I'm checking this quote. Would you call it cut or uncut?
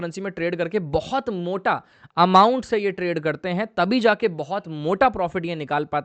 uncut